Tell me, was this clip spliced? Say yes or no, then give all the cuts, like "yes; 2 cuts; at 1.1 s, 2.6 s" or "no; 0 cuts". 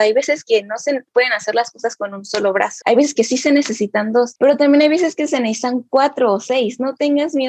no; 0 cuts